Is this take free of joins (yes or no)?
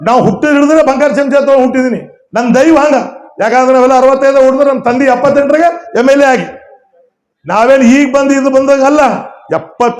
yes